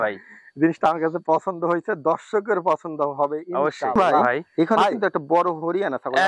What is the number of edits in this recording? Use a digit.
1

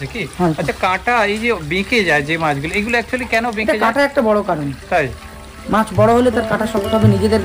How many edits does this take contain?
0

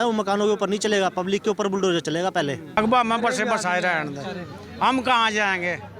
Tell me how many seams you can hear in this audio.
1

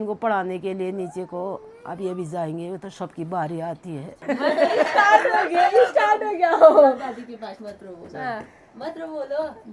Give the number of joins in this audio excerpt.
0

